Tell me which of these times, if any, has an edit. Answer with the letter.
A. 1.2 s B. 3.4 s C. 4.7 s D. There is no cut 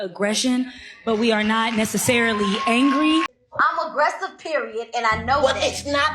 B